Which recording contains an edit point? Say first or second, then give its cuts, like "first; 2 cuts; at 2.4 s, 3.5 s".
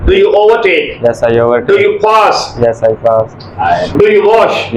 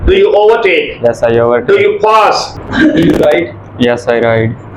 second; 1 cut; at 2.5 s